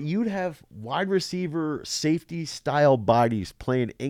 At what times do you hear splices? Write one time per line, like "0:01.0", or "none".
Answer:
none